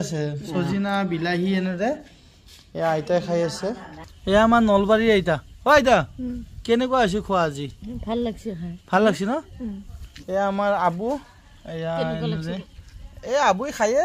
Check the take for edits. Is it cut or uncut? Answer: uncut